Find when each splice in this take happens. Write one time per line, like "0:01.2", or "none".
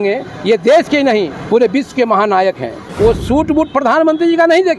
0:02.9